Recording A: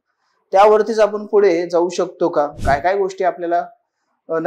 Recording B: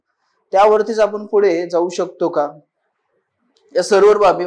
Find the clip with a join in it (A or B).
A